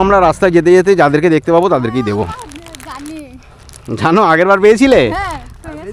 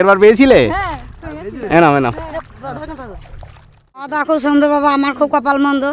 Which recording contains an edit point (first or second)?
second